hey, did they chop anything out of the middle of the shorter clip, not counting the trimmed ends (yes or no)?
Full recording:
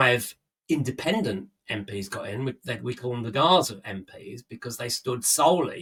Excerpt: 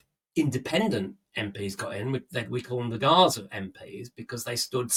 no